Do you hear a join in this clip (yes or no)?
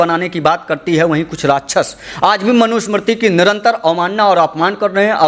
no